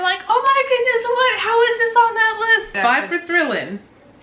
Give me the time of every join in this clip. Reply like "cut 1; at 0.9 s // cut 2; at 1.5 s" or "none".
cut 1; at 2.7 s